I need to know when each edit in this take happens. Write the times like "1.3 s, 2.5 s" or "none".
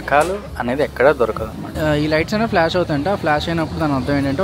1.6 s